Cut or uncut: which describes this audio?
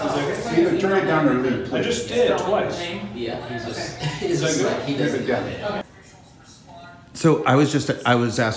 cut